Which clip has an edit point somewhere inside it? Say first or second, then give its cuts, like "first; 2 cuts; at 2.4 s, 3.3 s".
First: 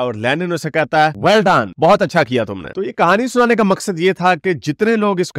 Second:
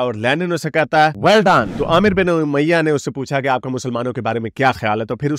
second; 1 cut; at 1.7 s